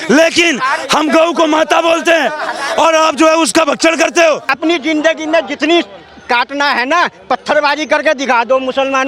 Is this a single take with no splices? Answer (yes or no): no